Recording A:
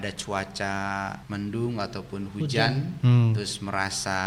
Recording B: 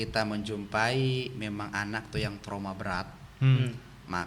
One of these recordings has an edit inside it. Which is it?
A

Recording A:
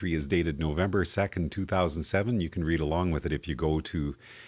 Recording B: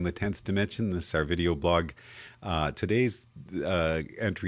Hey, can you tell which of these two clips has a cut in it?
B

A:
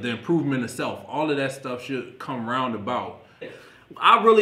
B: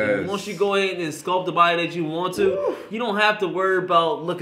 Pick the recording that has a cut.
A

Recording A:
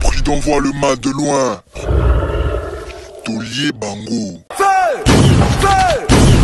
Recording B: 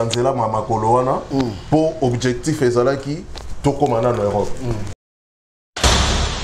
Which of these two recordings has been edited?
B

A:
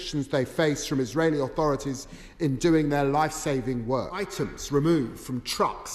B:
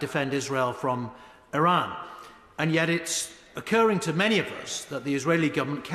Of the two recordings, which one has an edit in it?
A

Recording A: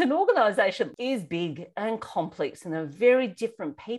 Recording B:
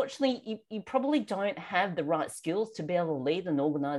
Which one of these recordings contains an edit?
A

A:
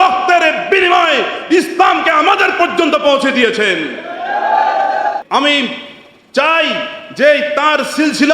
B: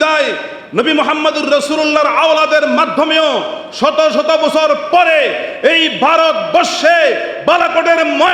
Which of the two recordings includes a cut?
A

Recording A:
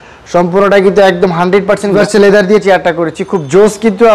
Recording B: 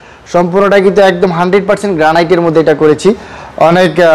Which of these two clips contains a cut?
A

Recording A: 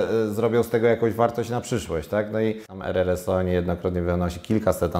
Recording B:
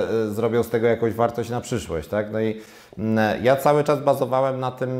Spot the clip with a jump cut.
A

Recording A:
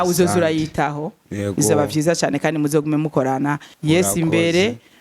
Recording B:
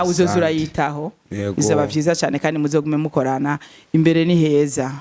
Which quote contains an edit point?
A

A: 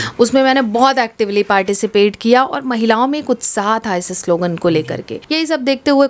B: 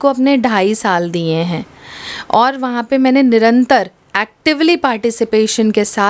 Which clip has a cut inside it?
A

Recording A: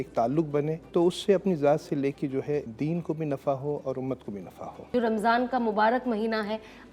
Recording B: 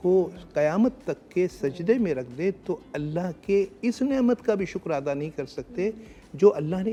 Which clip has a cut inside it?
A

